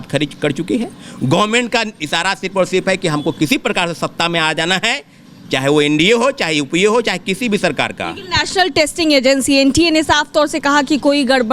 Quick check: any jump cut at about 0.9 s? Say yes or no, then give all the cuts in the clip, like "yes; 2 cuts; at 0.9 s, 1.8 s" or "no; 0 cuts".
no; 0 cuts